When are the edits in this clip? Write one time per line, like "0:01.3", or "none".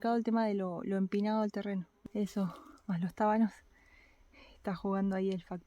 none